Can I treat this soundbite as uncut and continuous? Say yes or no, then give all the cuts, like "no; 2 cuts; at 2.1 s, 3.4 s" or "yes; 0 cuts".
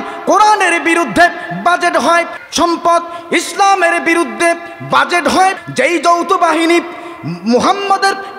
no; 2 cuts; at 2.4 s, 5.6 s